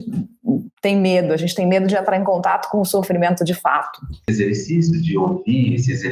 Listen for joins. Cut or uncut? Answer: cut